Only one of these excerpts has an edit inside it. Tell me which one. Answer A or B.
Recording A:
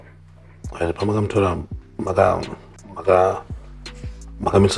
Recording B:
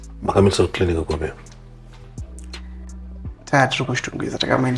B